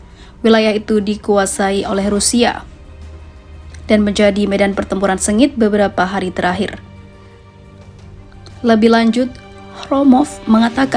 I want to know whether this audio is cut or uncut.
cut